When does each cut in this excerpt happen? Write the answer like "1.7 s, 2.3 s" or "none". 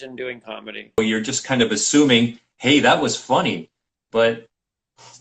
1.0 s